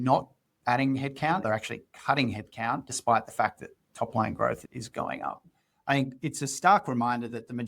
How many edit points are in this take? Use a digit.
2